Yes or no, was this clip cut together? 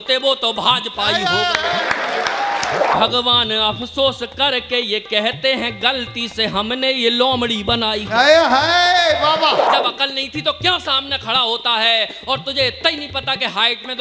yes